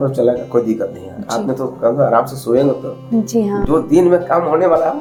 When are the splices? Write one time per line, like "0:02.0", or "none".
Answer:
none